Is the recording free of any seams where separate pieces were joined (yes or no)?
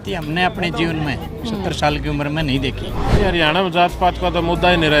no